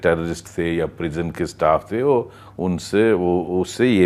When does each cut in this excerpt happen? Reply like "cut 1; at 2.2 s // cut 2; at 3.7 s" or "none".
none